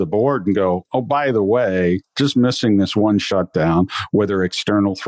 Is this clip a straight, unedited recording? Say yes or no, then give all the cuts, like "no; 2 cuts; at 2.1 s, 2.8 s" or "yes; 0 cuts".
yes; 0 cuts